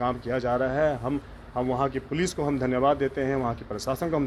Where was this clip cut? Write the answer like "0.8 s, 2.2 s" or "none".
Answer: none